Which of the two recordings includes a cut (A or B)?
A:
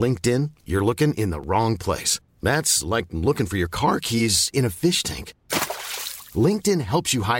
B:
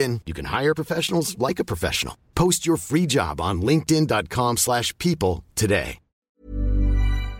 B